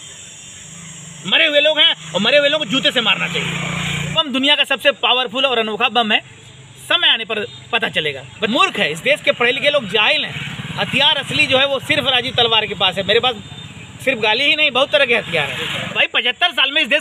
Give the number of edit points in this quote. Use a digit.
3